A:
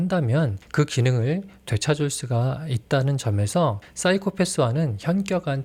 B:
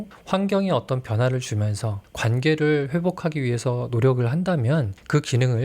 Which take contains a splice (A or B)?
B